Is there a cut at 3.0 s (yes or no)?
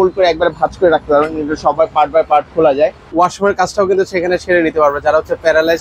yes